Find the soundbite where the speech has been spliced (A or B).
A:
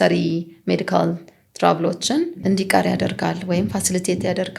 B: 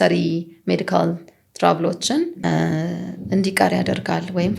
A